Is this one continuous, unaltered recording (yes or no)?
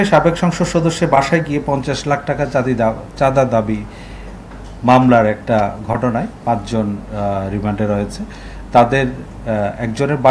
yes